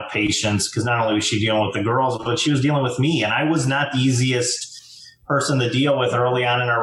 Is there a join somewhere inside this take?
no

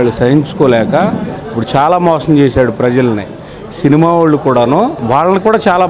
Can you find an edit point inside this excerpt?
yes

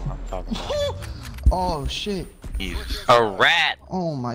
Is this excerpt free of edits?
yes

